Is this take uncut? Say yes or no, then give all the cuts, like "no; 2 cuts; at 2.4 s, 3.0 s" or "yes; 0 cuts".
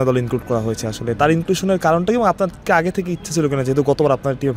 yes; 0 cuts